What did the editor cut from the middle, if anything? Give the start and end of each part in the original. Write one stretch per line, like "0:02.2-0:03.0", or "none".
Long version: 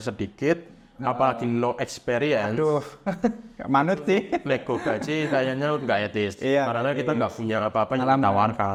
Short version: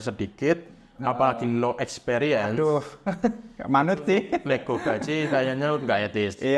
none